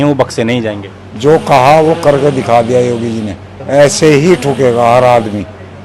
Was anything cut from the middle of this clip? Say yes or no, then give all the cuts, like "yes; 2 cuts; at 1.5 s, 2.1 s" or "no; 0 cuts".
yes; 1 cut; at 3.5 s